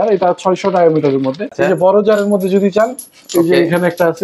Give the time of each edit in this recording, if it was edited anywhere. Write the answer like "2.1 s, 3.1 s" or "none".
1.5 s